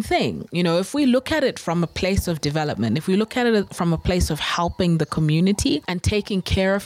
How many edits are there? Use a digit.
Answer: 1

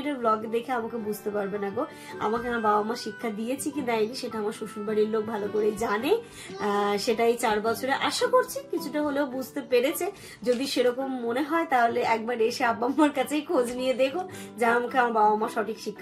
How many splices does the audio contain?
0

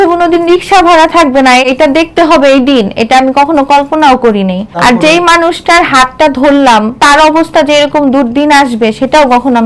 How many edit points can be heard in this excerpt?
2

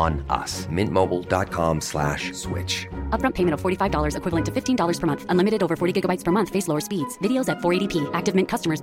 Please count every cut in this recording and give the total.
0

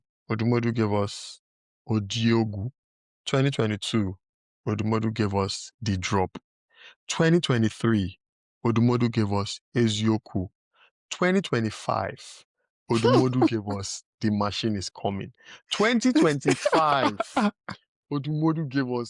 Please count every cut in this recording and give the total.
0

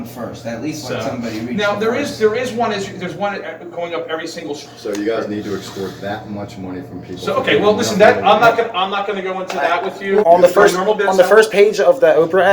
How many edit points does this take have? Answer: 2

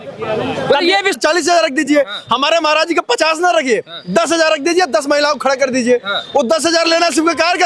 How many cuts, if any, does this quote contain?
1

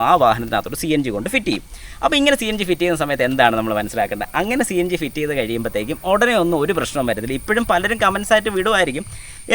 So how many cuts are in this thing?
0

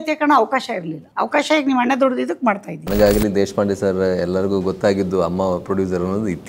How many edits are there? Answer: 2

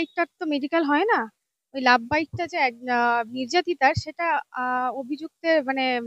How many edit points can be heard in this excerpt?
0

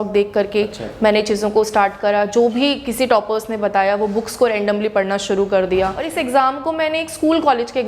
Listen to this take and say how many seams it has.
1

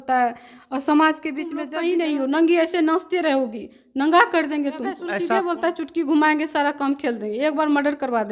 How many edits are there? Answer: 2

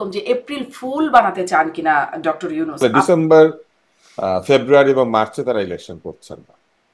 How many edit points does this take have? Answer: 1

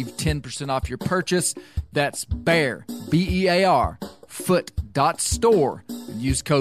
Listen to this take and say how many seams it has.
0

